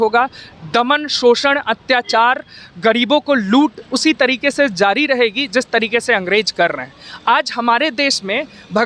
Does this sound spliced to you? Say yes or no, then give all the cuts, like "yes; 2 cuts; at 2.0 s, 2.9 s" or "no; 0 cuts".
no; 0 cuts